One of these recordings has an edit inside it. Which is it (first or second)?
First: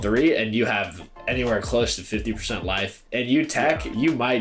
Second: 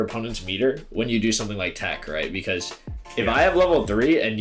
second